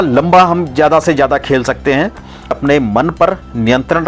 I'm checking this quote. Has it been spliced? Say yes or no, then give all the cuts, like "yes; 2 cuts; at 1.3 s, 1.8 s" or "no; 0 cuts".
yes; 1 cut; at 2.6 s